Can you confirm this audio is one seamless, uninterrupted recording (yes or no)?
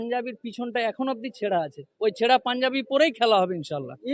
yes